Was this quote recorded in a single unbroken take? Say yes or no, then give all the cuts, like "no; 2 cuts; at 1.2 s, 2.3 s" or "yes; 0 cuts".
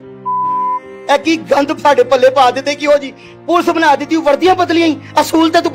no; 1 cut; at 1.0 s